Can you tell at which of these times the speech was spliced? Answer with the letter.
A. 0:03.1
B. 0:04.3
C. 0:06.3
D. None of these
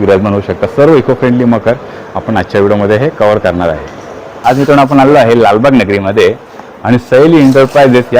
B